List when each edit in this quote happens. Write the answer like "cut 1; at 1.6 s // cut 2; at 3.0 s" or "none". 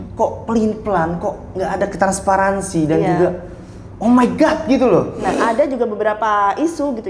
cut 1; at 5.4 s